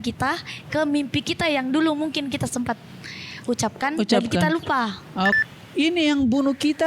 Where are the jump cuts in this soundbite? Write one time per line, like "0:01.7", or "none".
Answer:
0:05.4